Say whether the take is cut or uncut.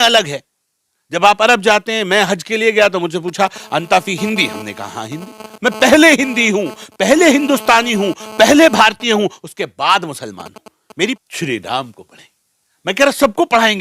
cut